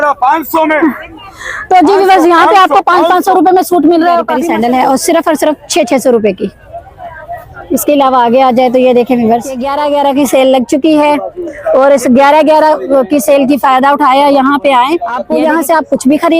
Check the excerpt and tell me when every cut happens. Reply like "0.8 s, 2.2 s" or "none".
4.4 s, 9.7 s, 15.2 s